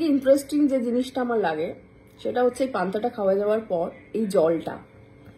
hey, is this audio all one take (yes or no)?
yes